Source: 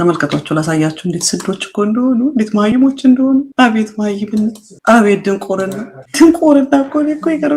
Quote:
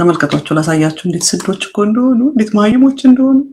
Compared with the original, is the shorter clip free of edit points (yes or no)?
yes